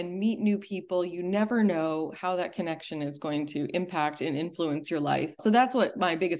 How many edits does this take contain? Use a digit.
1